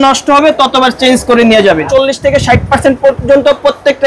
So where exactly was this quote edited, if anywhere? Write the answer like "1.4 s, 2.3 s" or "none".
1.9 s